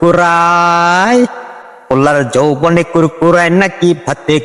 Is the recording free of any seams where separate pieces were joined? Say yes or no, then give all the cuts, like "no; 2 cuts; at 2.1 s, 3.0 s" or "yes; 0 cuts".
yes; 0 cuts